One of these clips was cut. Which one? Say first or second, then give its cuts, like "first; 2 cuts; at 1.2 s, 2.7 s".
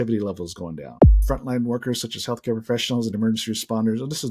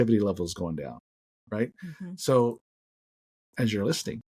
first; 1 cut; at 1.1 s